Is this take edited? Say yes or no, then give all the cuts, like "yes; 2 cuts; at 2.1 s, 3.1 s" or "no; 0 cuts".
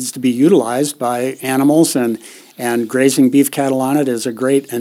no; 0 cuts